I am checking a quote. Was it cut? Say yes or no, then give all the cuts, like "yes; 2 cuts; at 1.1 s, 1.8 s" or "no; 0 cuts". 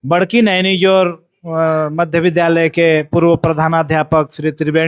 no; 0 cuts